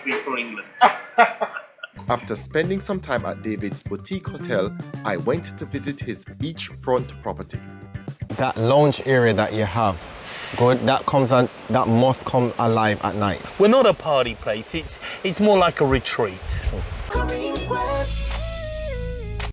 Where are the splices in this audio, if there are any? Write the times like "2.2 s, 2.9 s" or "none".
none